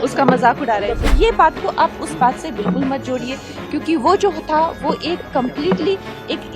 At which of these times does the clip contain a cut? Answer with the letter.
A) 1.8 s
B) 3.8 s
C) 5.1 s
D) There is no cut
D